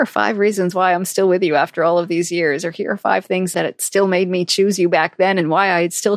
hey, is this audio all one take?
yes; 0 cuts

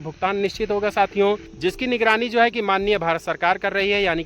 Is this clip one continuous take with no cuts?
no; 1 cut; at 1.5 s

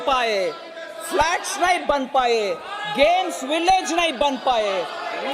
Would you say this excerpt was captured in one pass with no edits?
yes; 0 cuts

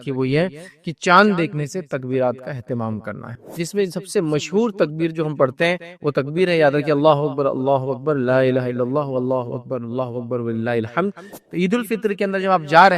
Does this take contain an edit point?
yes; 2 cuts; at 3.5 s, 11.3 s

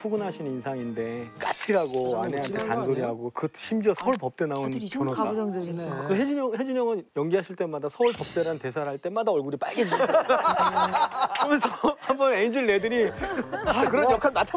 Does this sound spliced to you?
no; 0 cuts

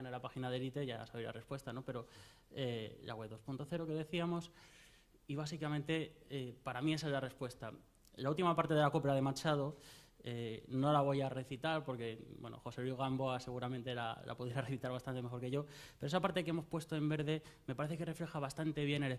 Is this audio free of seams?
no; 1 cut; at 15.4 s

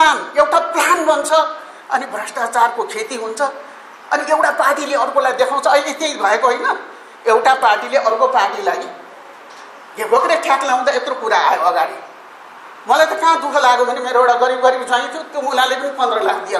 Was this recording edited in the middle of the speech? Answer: no; 0 cuts

